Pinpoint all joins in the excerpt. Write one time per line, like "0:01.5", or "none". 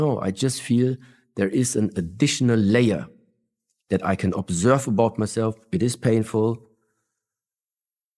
none